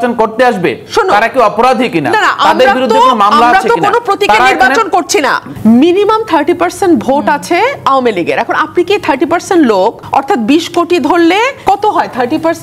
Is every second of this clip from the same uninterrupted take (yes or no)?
no